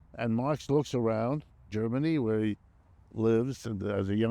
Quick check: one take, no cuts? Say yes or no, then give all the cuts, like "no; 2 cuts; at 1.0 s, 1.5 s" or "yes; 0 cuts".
no; 1 cut; at 1.6 s